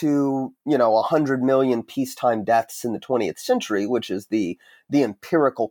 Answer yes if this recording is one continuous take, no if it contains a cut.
yes